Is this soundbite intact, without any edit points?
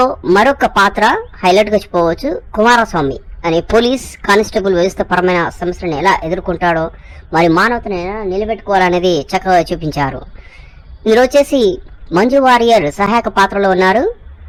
yes; 0 cuts

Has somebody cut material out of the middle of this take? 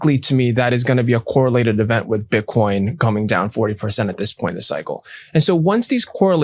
no; 0 cuts

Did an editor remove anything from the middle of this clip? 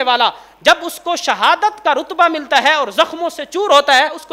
no; 0 cuts

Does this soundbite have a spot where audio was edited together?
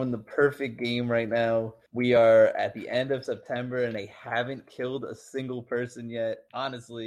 no; 0 cuts

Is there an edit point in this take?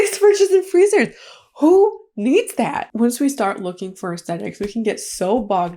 yes; 1 cut; at 2.8 s

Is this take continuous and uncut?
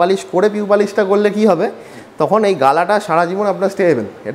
yes; 0 cuts

